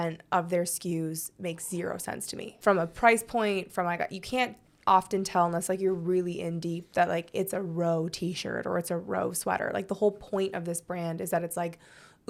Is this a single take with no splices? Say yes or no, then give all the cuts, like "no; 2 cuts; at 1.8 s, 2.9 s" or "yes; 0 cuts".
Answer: yes; 0 cuts